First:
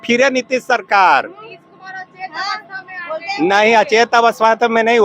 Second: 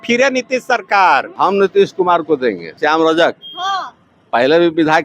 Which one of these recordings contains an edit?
second; 2 cuts; at 1.3 s, 2.8 s

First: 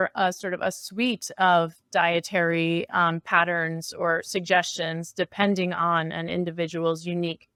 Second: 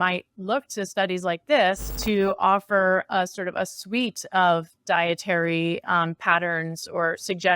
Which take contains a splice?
second; 1 cut; at 1.9 s

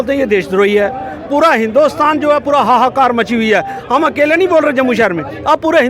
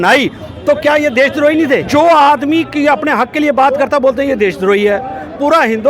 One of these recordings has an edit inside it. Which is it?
second; 1 cut; at 1.8 s

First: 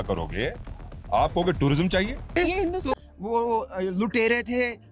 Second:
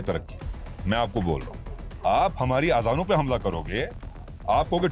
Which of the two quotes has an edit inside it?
first; 1 cut; at 2.9 s

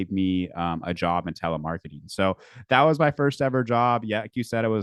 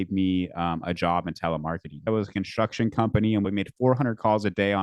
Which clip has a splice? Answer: second; 2 cuts; at 2.1 s, 3.4 s

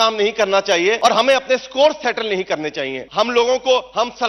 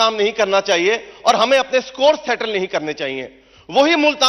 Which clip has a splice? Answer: first; 2 cuts; at 1.0 s, 3.3 s

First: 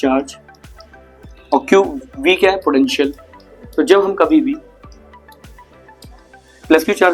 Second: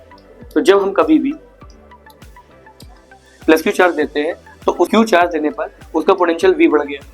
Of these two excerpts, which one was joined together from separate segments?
second; 1 cut; at 4.9 s

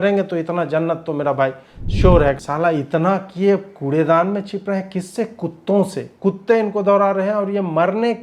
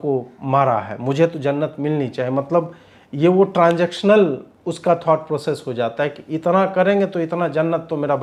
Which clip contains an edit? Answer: first; 2 cuts; at 2.4 s, 6.0 s

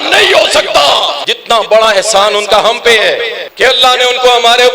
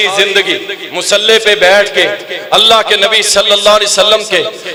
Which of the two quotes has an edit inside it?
first; 2 cuts; at 1.3 s, 3.4 s

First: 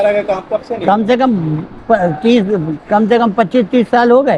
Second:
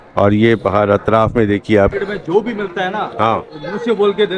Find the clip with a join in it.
second; 1 cut; at 1.9 s

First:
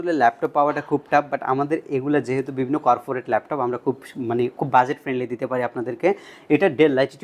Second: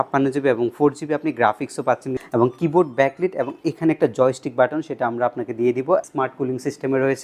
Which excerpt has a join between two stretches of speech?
second; 2 cuts; at 2.2 s, 6.0 s

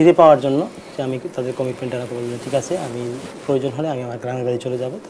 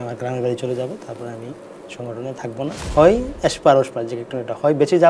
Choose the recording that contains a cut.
second; 1 cut; at 2.8 s

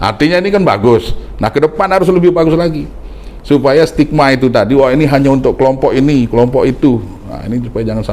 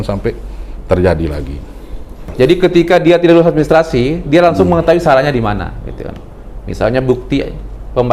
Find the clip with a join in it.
second; 1 cut; at 2.3 s

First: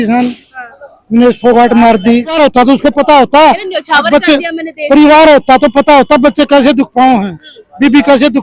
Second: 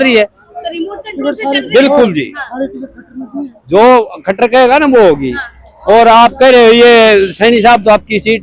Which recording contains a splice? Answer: first; 1 cut; at 2.4 s

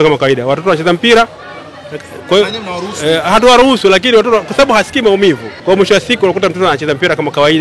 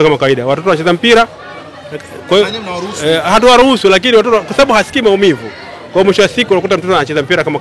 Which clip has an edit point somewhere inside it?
first; 1 cut; at 5.5 s

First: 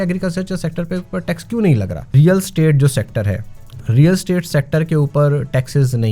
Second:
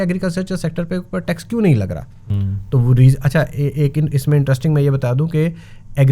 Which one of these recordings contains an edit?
first; 1 cut; at 2.1 s

